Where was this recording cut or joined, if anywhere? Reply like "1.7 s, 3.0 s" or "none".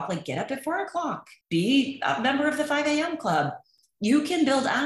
1.3 s